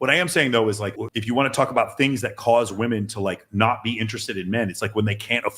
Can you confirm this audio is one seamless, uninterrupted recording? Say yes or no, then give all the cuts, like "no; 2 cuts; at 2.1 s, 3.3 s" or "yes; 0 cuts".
no; 1 cut; at 1.0 s